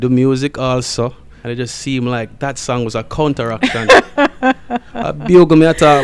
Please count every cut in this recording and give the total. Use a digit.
1